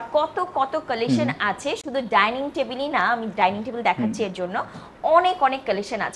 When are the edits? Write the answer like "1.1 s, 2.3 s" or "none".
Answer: none